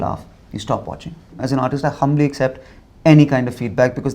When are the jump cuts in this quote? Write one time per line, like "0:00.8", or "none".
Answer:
0:01.4